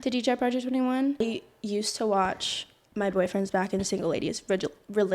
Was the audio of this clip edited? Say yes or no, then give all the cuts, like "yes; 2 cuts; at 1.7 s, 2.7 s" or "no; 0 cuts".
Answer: yes; 1 cut; at 1.2 s